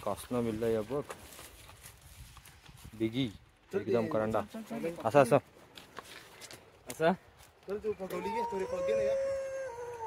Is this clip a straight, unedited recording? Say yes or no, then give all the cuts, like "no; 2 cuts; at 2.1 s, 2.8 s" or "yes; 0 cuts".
yes; 0 cuts